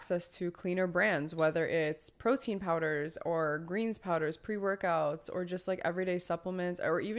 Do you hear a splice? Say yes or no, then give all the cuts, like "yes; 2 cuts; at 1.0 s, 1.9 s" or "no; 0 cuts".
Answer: no; 0 cuts